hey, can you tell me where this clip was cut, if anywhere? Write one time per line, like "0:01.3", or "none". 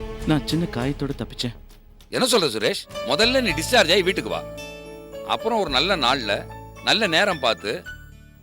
0:02.9